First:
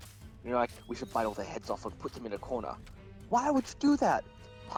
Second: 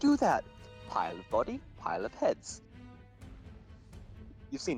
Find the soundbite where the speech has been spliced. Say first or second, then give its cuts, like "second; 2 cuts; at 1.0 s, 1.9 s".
second; 1 cut; at 2.9 s